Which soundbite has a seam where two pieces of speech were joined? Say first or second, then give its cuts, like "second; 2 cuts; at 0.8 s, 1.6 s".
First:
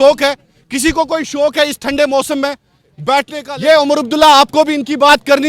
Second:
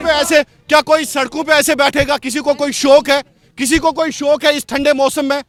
first; 1 cut; at 3.6 s